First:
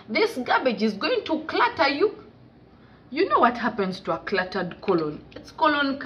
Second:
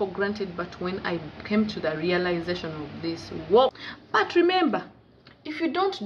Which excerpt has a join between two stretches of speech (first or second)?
second